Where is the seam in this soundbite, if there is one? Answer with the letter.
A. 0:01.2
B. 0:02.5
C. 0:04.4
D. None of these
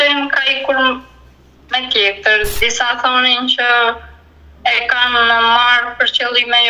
B